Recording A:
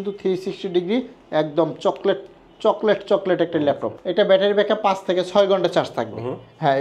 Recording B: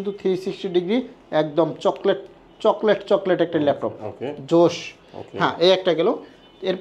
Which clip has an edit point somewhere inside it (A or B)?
A